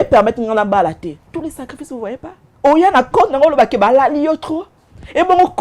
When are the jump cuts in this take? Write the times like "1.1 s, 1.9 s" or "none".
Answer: 2.4 s